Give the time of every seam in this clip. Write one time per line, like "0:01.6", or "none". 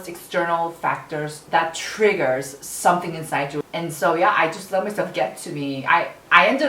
0:03.6